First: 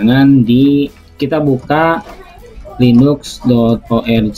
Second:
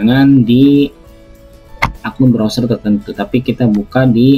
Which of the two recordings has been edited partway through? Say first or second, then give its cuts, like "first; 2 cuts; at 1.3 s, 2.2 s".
first; 1 cut; at 1.1 s